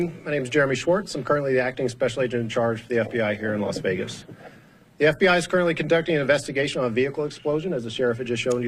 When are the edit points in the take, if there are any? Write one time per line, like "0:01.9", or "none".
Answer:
none